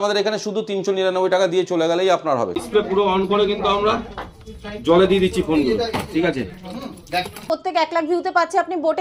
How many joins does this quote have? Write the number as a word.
two